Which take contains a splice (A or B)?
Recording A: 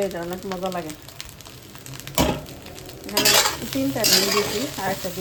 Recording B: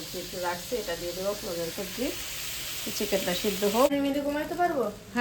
B